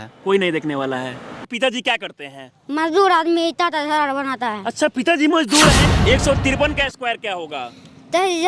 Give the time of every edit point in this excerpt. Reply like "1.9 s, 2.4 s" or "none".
1.4 s, 5.9 s